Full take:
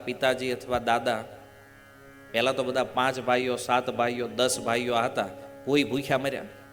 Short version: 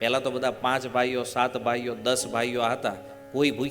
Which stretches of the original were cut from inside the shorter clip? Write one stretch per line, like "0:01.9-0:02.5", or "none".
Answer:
none